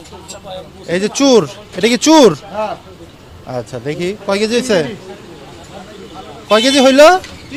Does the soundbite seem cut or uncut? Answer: uncut